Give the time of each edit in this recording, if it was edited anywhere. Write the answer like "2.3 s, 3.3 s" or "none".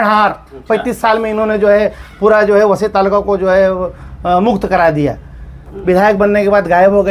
none